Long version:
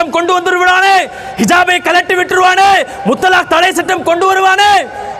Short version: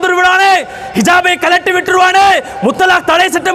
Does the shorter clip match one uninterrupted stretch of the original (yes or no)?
yes